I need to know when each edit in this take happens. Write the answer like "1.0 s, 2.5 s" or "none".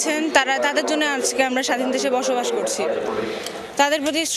none